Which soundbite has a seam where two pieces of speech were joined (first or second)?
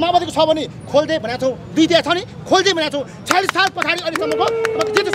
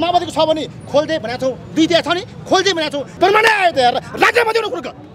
second